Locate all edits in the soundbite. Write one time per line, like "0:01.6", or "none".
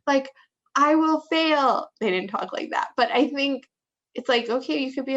none